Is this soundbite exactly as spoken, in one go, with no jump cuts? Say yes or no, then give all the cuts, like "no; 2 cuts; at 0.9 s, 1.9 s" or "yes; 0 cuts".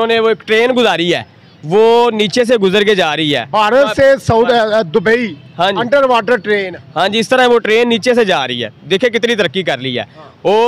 yes; 0 cuts